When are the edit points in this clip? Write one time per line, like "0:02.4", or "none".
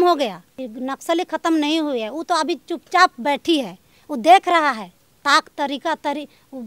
none